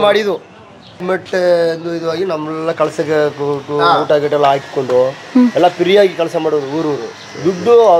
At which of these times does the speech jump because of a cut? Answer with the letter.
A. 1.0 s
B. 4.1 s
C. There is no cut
A